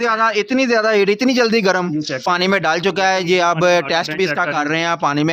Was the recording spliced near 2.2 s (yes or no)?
yes